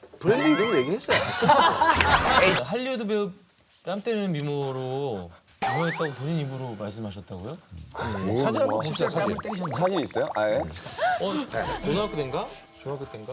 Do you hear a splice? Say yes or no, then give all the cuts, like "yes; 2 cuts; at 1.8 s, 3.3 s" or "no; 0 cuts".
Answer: yes; 1 cut; at 2.6 s